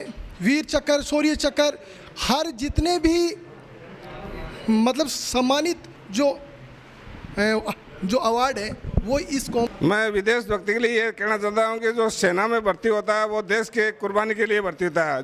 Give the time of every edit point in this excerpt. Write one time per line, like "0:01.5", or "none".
0:09.7

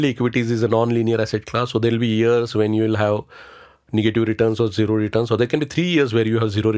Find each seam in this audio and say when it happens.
none

